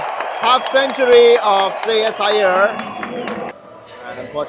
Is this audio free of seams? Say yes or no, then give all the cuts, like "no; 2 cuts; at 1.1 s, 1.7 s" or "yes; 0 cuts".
no; 1 cut; at 3.5 s